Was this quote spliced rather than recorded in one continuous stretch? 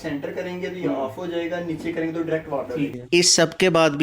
yes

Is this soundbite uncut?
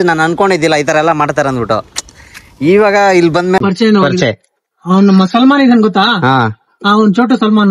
no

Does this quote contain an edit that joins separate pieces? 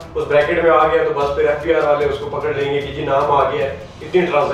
no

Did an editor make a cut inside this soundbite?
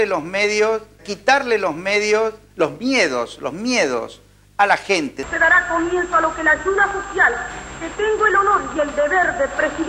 no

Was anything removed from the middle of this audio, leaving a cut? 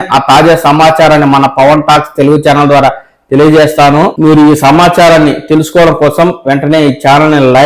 yes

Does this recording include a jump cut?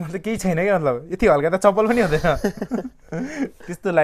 no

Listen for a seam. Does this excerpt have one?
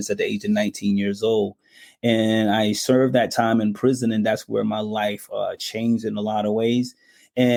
no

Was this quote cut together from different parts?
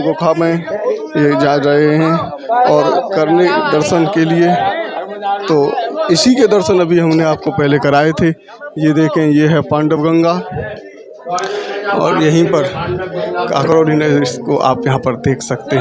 no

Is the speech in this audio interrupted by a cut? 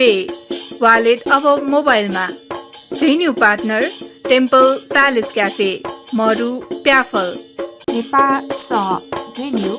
yes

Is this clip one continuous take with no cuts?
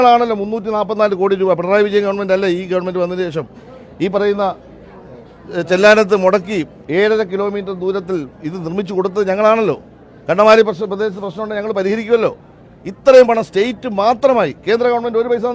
yes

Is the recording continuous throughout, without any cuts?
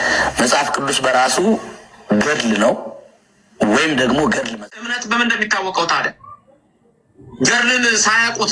no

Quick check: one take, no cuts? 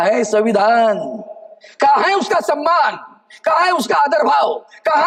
yes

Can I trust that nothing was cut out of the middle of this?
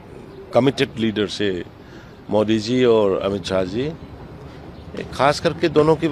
yes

